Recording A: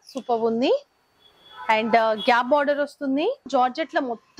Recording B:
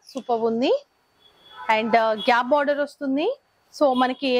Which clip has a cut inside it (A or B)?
A